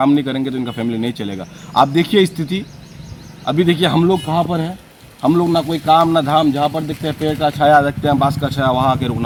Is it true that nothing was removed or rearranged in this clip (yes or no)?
yes